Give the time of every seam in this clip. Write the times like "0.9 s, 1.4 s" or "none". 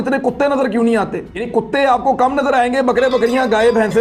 1.5 s